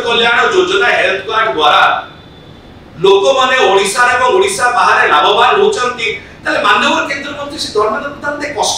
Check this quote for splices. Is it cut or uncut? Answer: uncut